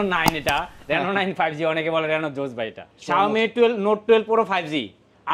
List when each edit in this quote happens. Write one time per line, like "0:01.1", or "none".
0:02.9